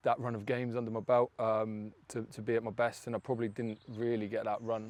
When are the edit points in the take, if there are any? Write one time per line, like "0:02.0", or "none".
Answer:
none